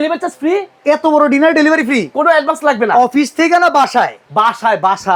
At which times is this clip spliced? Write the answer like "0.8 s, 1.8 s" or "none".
none